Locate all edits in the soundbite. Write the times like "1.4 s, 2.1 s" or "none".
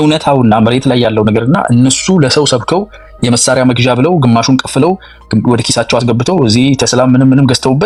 none